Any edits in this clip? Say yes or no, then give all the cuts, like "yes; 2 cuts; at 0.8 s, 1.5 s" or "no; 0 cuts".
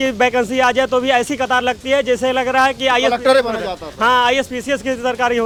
no; 0 cuts